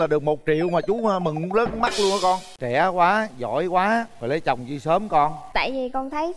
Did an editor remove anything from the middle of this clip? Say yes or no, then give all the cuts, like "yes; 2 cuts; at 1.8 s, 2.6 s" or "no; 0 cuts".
yes; 1 cut; at 2.5 s